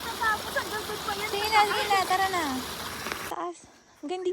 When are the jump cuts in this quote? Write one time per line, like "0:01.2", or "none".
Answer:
0:03.3